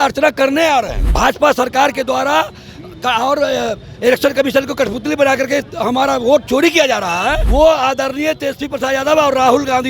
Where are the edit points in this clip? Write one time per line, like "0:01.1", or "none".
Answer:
0:01.0
0:07.4